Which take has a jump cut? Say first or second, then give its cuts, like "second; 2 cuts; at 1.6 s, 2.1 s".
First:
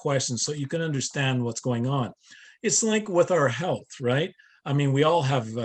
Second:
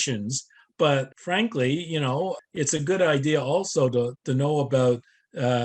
second; 3 cuts; at 1.2 s, 2.4 s, 4.2 s